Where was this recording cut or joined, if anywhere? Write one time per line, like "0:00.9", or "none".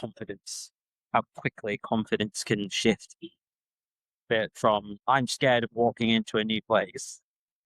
0:04.9